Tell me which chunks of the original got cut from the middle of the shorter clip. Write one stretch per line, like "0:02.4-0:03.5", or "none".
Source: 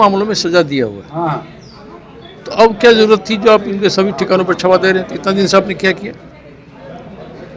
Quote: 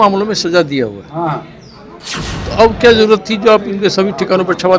none